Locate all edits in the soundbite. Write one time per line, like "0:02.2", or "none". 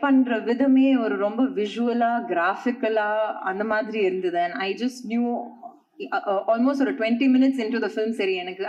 none